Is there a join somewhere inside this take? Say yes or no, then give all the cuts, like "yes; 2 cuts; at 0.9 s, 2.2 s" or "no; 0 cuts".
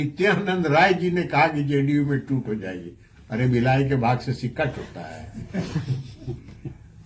no; 0 cuts